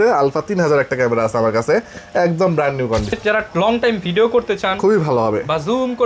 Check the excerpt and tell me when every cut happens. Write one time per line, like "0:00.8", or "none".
0:03.1